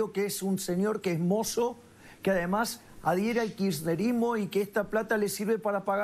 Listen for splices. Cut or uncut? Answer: uncut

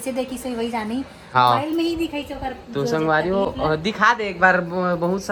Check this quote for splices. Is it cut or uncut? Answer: uncut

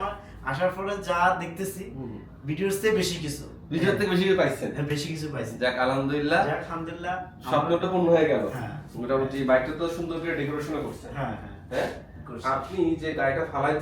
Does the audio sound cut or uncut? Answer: uncut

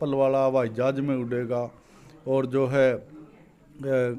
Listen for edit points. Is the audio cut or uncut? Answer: uncut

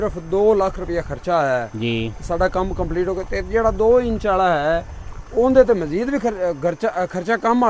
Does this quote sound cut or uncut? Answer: uncut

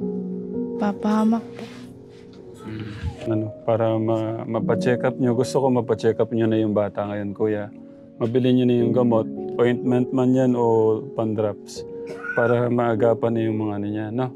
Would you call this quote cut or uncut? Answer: cut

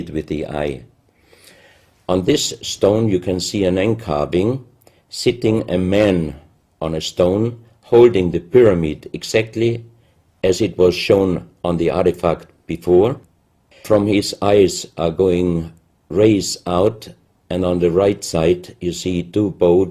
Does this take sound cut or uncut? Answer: cut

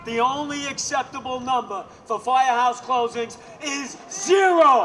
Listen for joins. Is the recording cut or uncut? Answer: uncut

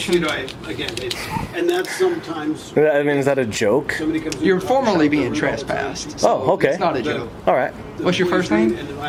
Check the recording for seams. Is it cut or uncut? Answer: uncut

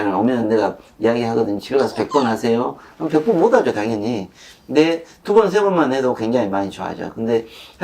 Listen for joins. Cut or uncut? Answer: uncut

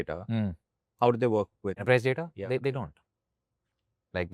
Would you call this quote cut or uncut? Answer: cut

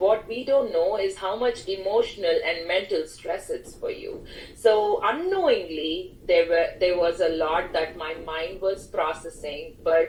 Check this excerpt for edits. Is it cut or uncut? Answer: uncut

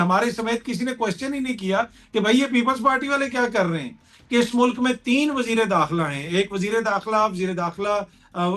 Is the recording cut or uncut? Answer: cut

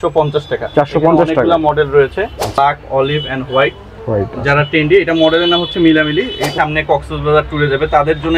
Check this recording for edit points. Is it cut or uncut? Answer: cut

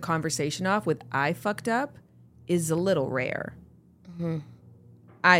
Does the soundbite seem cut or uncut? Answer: uncut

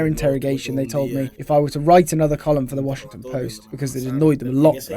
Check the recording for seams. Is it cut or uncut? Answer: cut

